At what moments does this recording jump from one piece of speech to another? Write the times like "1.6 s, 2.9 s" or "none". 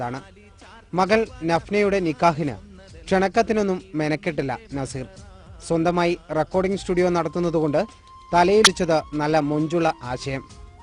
8.6 s